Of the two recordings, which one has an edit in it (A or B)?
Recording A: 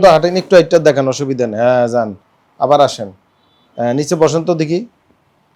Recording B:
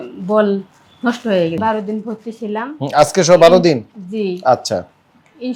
B